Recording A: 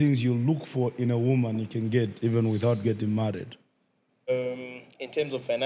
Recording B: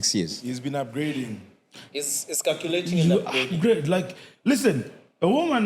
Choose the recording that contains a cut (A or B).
A